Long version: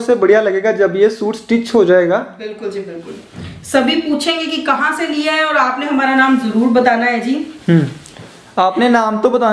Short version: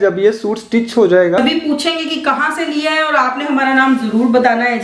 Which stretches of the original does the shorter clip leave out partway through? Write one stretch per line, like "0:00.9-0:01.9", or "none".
0:02.2-0:03.8